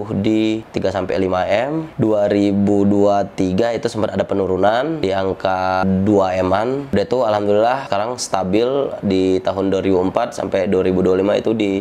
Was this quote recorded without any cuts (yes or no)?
yes